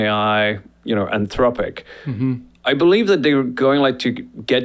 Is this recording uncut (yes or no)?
yes